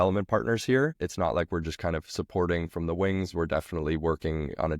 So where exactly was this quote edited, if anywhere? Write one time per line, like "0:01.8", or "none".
0:01.0